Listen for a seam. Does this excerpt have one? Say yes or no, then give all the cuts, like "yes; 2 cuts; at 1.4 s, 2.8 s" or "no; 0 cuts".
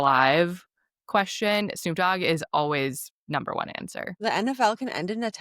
yes; 1 cut; at 4.1 s